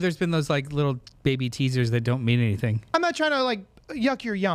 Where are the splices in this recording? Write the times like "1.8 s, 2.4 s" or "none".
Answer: 2.9 s